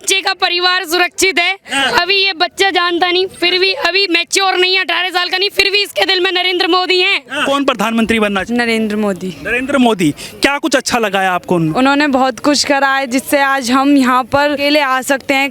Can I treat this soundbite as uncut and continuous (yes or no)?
no